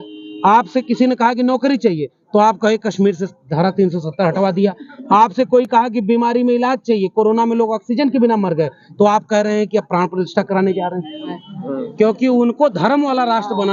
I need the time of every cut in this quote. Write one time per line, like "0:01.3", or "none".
0:11.3